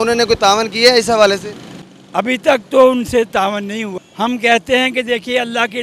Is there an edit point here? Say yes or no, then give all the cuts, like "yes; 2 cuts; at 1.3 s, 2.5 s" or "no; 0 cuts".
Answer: yes; 1 cut; at 3.9 s